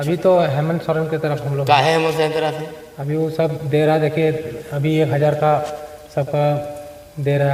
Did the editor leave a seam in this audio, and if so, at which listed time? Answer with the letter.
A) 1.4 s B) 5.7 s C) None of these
C